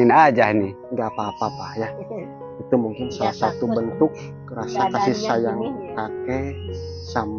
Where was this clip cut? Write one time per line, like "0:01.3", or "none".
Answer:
none